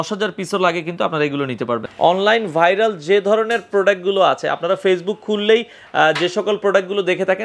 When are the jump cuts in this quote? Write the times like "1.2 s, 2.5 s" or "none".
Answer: 1.8 s